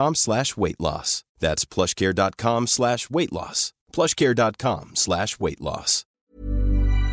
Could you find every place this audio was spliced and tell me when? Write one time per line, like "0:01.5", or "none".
0:06.0